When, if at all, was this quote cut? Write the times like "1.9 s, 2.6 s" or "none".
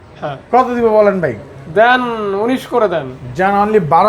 none